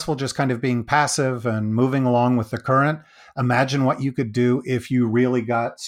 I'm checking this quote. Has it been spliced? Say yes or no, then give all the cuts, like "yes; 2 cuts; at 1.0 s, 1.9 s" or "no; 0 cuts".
no; 0 cuts